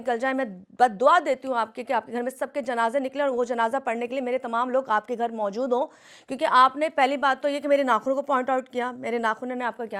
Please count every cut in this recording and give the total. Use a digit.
0